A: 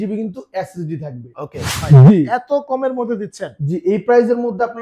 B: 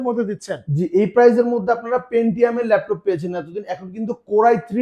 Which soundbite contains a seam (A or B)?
A